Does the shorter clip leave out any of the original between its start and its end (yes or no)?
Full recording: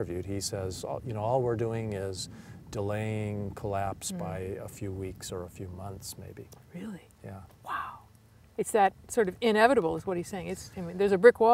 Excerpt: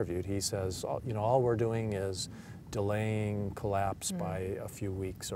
no